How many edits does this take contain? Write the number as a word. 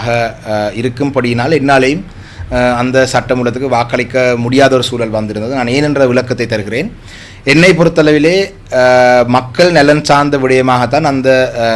zero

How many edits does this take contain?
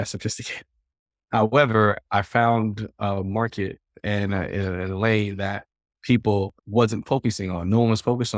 one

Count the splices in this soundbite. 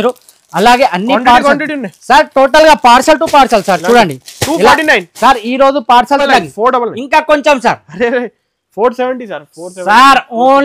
one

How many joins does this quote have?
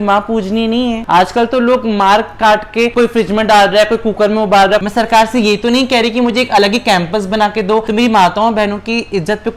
three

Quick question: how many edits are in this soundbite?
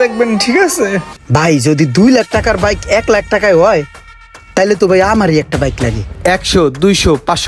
two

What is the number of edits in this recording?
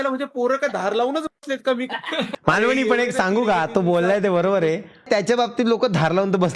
one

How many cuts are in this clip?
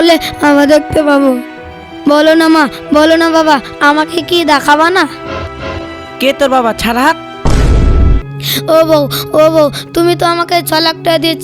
one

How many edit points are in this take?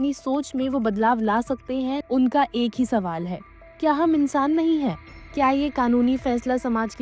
two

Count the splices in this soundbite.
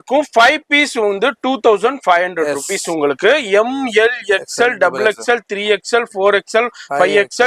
zero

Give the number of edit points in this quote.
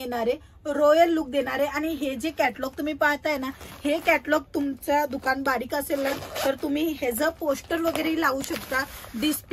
zero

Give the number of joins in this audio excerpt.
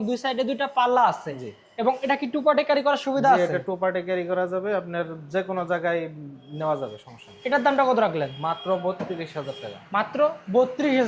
zero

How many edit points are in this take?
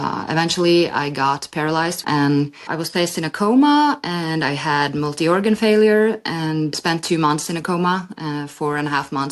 one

